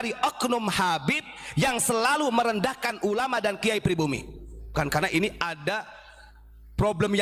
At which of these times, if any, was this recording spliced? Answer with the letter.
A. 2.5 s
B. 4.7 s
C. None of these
B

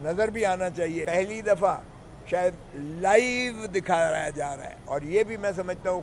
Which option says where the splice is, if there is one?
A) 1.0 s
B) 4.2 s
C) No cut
A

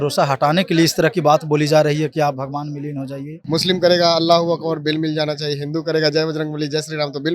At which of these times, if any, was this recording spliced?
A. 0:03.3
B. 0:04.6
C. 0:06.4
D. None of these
A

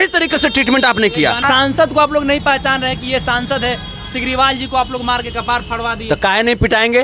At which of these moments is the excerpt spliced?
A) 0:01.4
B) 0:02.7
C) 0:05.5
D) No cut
A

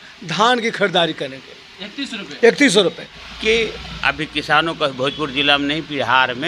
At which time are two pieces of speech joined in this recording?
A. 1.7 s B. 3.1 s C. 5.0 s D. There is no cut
B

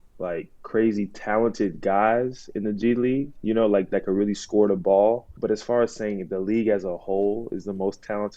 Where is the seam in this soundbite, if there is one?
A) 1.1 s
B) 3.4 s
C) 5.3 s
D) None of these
C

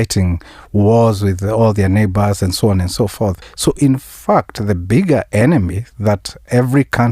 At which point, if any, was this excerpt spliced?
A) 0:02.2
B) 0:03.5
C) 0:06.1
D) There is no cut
B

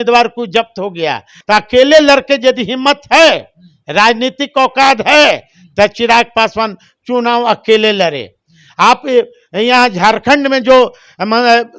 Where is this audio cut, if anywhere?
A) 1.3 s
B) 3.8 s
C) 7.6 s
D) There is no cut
A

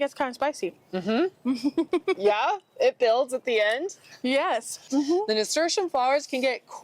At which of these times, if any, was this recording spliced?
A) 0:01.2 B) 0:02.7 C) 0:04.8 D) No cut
C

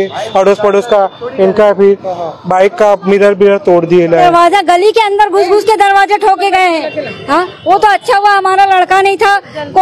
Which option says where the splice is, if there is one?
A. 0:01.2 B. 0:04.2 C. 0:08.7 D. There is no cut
B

